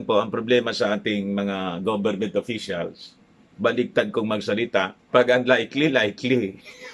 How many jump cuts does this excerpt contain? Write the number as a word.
one